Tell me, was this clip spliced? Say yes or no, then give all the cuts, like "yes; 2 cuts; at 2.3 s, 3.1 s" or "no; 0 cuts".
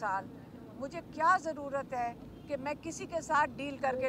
no; 0 cuts